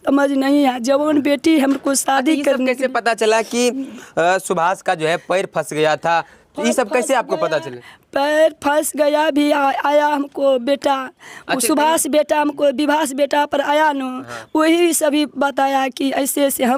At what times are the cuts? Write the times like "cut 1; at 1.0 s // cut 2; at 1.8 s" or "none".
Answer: none